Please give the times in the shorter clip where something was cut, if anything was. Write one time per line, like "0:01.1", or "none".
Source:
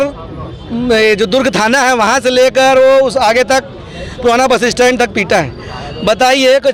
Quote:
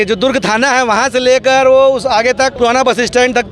0:02.5